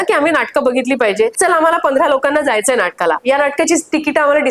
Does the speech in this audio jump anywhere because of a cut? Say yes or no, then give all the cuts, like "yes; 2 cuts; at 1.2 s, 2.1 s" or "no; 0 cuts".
yes; 1 cut; at 1.3 s